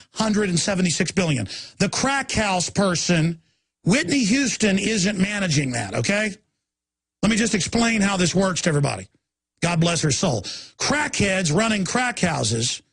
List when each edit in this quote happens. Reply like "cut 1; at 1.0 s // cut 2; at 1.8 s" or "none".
cut 1; at 11.1 s